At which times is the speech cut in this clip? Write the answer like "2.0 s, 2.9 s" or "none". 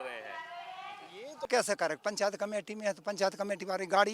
1.4 s